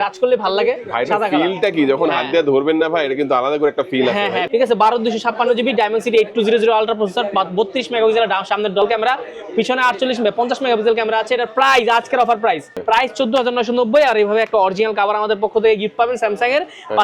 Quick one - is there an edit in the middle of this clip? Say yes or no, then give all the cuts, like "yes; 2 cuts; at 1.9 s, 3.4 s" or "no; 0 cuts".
yes; 3 cuts; at 4.4 s, 8.8 s, 12.8 s